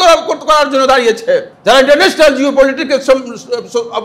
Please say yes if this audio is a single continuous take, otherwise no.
no